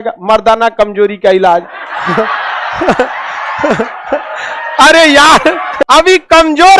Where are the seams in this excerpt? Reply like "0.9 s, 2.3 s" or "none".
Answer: 5.8 s